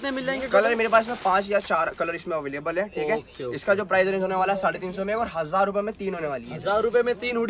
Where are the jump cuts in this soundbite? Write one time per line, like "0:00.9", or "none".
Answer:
none